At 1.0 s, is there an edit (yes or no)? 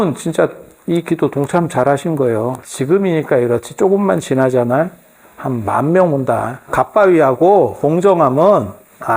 no